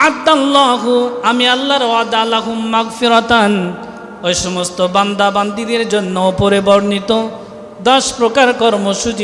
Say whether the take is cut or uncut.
uncut